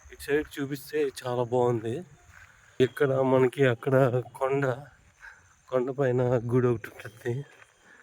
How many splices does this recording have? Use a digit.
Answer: 1